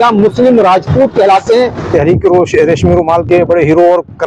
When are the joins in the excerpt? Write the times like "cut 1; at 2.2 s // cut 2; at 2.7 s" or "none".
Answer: cut 1; at 1.9 s